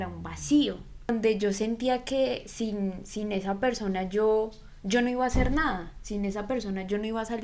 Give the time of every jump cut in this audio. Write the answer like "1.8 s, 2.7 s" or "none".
1.1 s